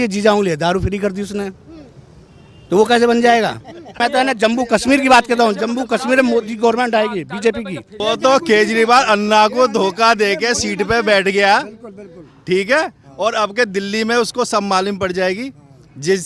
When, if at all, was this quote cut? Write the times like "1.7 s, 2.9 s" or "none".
3.9 s, 7.9 s